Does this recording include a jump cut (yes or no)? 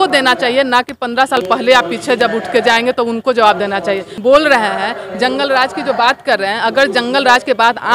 yes